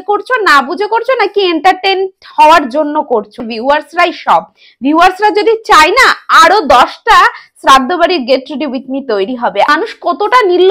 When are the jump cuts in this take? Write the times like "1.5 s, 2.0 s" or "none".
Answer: 3.4 s, 9.7 s